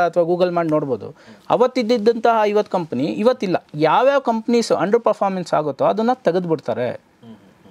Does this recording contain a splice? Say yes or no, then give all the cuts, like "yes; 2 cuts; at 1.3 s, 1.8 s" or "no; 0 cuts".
yes; 1 cut; at 3.7 s